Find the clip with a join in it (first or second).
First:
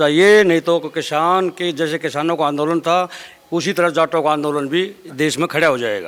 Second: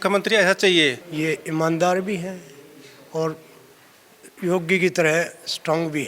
second